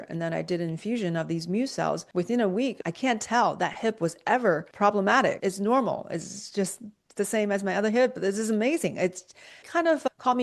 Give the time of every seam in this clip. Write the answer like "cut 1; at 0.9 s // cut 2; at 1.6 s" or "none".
cut 1; at 2.0 s // cut 2; at 2.8 s // cut 3; at 4.7 s // cut 4; at 5.4 s

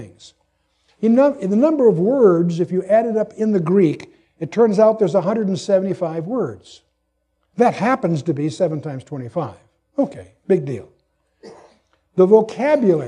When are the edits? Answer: cut 1; at 4.4 s

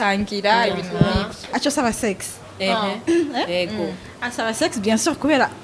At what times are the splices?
cut 1; at 1.5 s

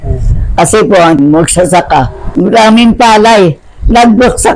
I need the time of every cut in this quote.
cut 1; at 1.2 s

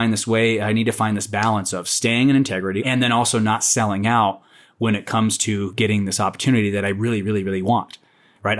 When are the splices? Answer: cut 1; at 2.8 s

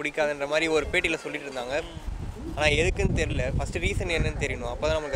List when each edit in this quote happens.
none

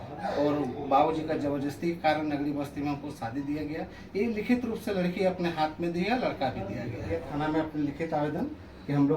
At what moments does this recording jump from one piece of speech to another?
cut 1; at 7.2 s

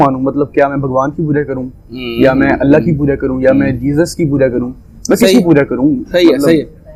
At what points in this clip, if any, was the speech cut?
none

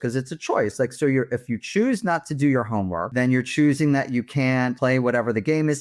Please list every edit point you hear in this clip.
cut 1; at 3.1 s // cut 2; at 4.8 s

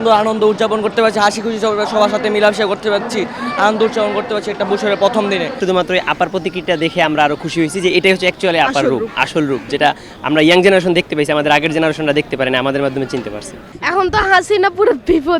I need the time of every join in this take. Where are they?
cut 1; at 5.5 s // cut 2; at 13.8 s

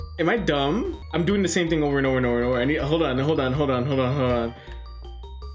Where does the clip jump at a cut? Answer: cut 1; at 1.0 s

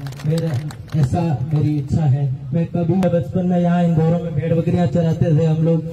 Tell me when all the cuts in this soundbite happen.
cut 1; at 3.0 s

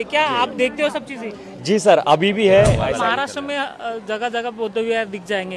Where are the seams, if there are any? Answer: cut 1; at 2.8 s

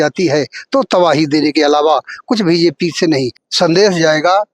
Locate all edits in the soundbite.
cut 1; at 3.4 s

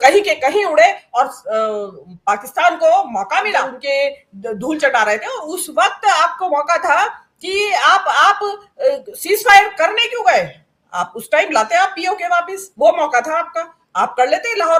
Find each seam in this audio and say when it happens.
none

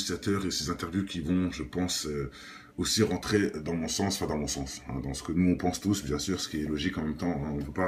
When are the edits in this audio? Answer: none

